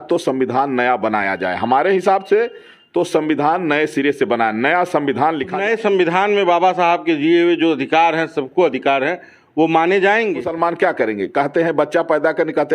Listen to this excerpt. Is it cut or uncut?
cut